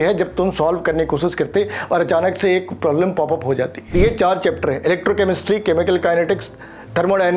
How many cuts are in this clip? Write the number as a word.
one